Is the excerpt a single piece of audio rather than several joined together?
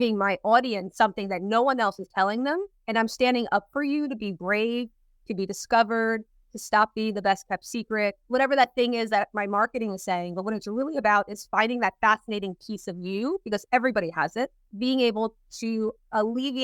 no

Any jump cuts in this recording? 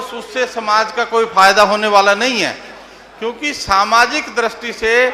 no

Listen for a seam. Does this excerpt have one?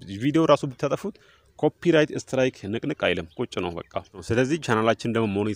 yes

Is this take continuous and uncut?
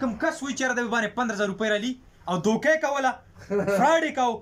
yes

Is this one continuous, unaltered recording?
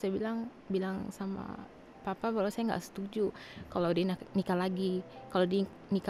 yes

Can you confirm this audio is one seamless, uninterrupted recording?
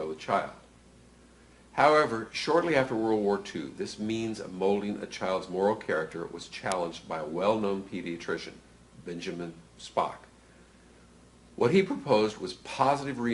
no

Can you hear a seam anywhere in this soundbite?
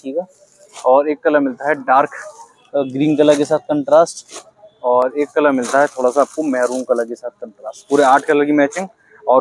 no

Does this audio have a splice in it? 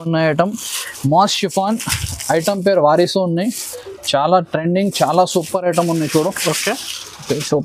no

